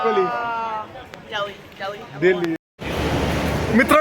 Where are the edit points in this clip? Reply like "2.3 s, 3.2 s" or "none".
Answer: 2.6 s